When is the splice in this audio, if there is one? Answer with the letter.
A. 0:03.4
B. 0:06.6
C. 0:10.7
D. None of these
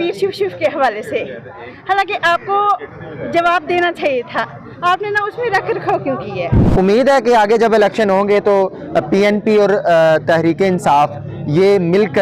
B